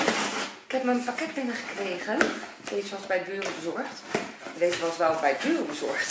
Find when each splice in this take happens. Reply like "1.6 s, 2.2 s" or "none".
none

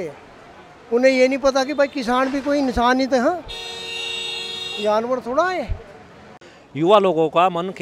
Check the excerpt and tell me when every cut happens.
6.4 s

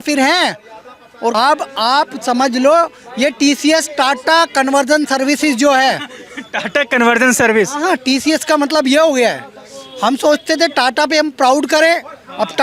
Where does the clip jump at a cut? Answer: 1.3 s

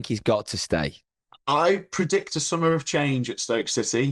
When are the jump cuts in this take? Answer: 1.0 s

